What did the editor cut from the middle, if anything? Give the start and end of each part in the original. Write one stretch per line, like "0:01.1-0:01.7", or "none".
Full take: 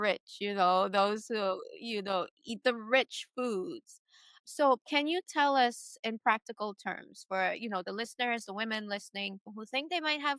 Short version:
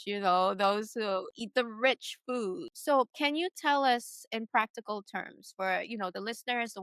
0:01.7-0:02.5
0:03.8-0:04.4